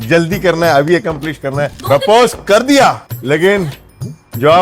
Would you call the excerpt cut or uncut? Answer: cut